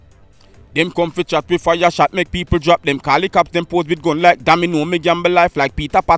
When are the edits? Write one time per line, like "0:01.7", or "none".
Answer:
none